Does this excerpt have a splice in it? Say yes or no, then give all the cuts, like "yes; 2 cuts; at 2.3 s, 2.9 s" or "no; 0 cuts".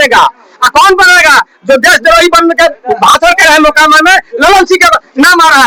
no; 0 cuts